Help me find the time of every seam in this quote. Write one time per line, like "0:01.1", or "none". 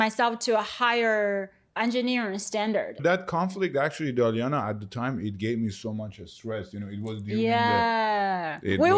0:03.0